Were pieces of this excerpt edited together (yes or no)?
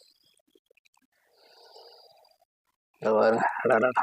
yes